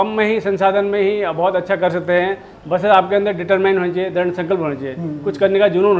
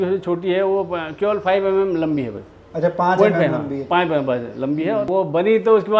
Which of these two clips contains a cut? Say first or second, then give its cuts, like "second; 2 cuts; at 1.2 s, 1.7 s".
second; 1 cut; at 5.1 s